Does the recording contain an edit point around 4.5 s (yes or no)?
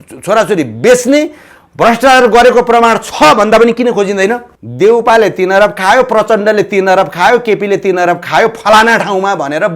yes